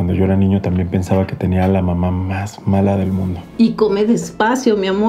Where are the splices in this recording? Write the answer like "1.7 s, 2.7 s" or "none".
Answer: 3.4 s